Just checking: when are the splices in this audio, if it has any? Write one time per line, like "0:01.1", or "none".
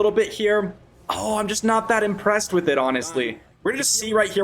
0:03.5

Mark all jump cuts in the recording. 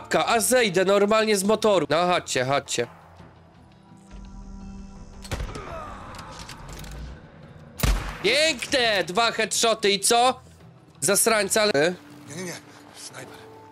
0:01.9
0:11.7

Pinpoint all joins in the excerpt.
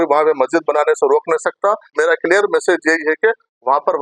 0:01.9

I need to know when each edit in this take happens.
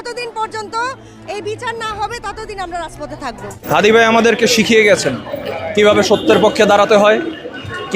0:03.7

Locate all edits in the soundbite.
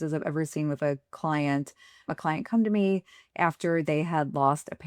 0:02.1

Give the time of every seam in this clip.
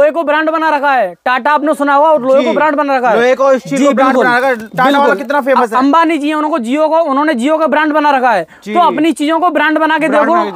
none

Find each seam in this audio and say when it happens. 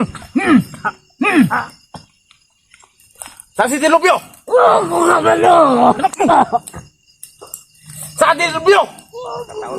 0:06.4

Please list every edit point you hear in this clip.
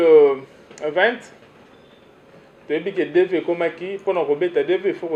none

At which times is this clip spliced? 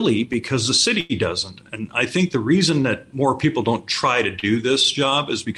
0:03.1

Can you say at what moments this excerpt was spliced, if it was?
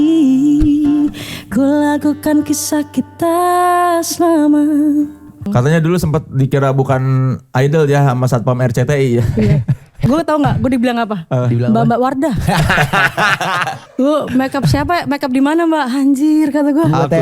0:05.5
0:10.0
0:13.8

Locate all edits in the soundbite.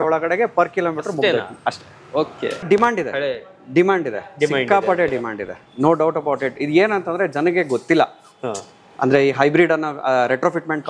0:02.6

